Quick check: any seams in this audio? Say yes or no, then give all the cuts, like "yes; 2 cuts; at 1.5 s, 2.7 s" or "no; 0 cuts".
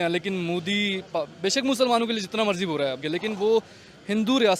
no; 0 cuts